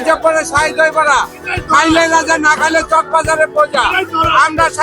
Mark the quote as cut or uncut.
uncut